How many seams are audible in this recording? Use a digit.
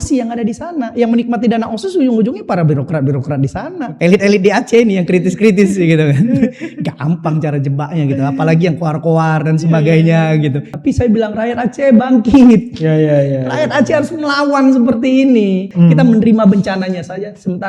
3